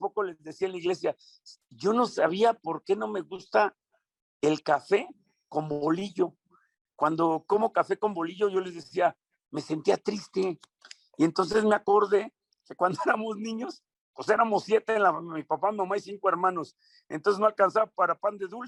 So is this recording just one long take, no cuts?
yes; 0 cuts

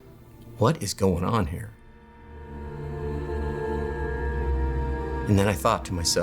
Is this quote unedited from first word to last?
no; 1 cut; at 5.3 s

